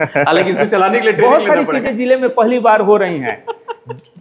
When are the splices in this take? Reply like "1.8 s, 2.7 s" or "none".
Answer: none

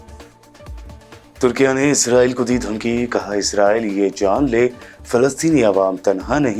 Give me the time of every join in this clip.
1.1 s

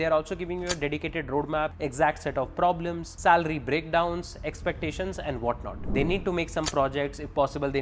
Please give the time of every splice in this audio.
1.7 s, 3.0 s, 5.8 s

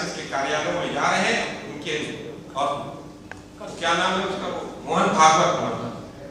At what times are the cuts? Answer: none

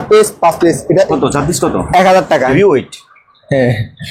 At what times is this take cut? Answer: 1.1 s, 2.5 s

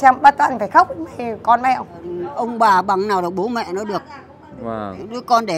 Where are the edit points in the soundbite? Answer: 2.2 s

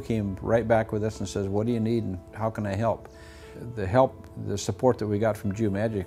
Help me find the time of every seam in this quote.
3.5 s

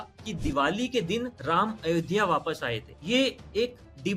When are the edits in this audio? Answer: 1.4 s, 2.9 s

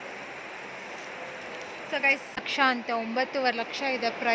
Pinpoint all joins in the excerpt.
2.5 s

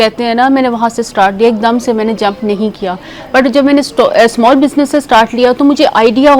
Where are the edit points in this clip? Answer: none

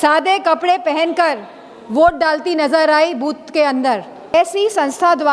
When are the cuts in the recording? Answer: 4.3 s

